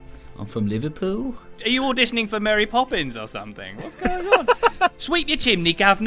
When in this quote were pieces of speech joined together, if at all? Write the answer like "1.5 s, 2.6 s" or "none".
1.6 s, 5.0 s